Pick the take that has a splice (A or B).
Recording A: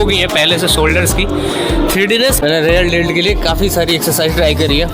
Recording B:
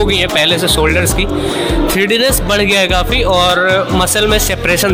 A